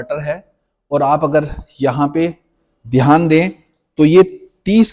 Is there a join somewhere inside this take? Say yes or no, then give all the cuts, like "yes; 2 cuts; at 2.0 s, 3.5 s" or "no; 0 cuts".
no; 0 cuts